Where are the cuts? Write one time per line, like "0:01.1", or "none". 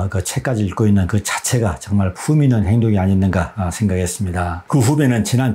0:04.6